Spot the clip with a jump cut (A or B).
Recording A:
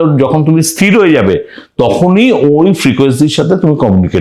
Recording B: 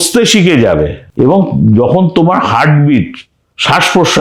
B